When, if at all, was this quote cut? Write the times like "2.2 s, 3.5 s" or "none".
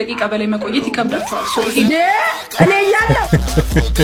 none